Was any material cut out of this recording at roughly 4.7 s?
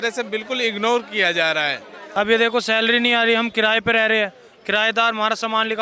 no; 1 cut; at 1.9 s

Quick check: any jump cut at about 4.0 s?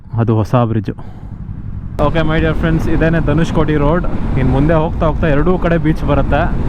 no; 1 cut; at 1.9 s

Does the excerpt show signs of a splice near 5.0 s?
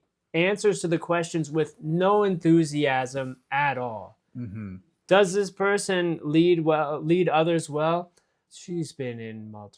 no; 1 cut; at 8.4 s

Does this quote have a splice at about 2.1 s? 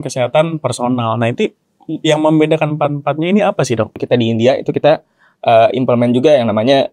no; 1 cut; at 4.0 s

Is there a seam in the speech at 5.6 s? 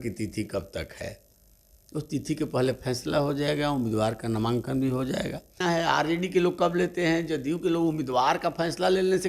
yes; 1 cut; at 5.6 s

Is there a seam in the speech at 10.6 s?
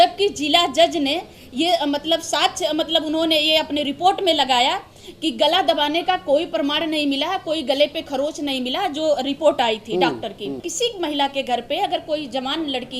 yes; 1 cut; at 10.6 s

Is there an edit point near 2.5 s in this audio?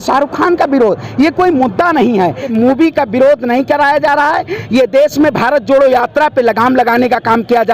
yes; 1 cut; at 2.5 s

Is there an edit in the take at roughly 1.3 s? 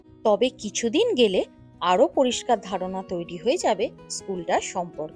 no; 0 cuts

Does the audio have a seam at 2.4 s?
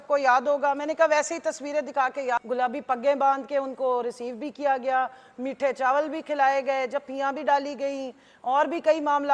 yes; 1 cut; at 2.4 s

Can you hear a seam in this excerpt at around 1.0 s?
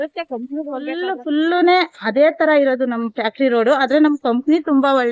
yes; 1 cut; at 1.0 s

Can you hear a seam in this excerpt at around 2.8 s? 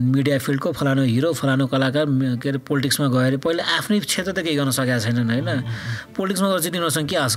no; 0 cuts

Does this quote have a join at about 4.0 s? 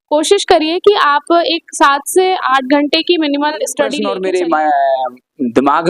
yes; 1 cut; at 4.0 s

